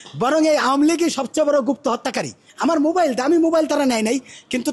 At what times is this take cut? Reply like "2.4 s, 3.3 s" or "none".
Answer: 2.4 s